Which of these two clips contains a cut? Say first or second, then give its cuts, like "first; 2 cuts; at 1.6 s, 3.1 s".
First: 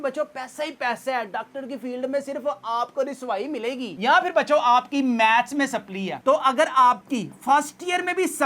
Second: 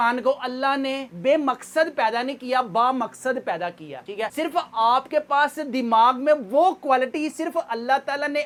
first; 2 cuts; at 3.9 s, 6.2 s